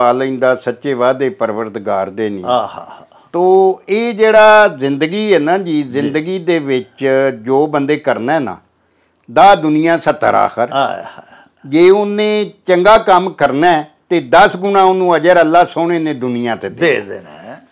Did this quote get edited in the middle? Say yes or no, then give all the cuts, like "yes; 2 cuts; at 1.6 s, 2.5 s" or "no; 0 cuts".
no; 0 cuts